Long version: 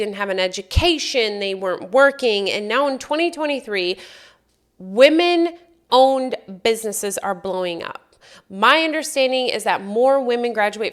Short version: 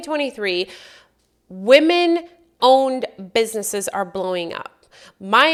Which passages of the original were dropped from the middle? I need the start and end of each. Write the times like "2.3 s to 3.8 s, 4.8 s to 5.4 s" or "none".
none